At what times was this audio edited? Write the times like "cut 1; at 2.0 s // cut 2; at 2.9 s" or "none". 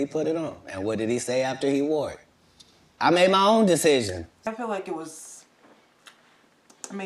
cut 1; at 4.5 s